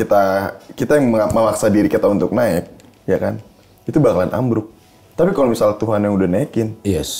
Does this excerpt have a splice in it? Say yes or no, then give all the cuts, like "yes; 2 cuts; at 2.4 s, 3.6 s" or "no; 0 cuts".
no; 0 cuts